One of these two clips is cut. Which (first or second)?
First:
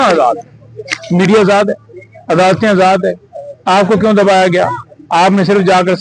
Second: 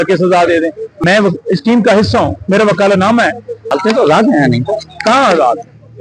second